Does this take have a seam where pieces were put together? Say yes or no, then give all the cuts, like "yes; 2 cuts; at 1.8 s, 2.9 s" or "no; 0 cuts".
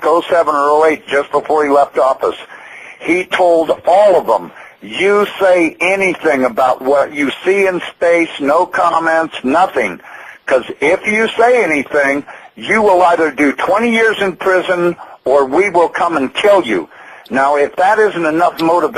no; 0 cuts